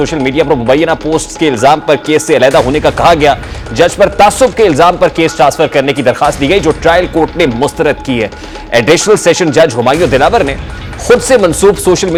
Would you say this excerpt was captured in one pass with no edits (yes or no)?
yes